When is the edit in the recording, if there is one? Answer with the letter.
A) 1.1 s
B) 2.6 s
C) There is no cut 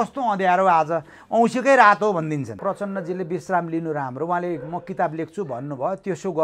B